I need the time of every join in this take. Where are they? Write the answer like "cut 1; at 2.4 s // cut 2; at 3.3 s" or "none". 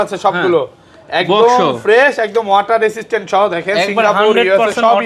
none